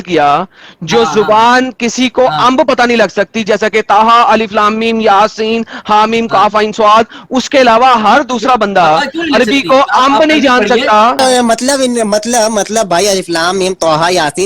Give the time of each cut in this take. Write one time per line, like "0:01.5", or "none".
0:11.2